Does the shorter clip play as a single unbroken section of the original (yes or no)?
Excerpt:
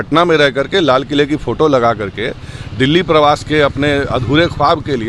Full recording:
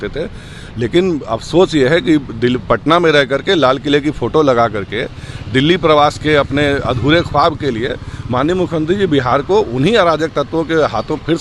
yes